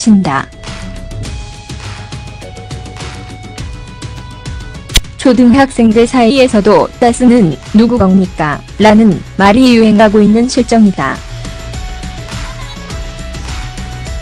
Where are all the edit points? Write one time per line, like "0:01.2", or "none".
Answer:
0:06.0